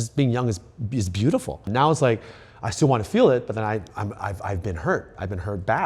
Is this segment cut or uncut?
cut